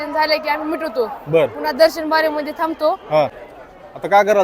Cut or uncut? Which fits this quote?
cut